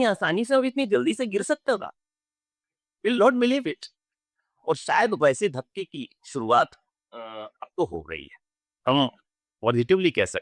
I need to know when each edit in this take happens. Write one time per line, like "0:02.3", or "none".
none